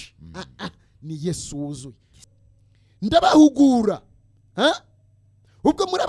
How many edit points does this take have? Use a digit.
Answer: 1